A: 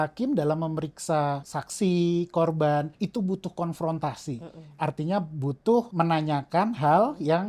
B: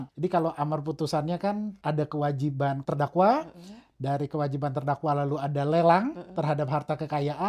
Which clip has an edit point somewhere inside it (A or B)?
A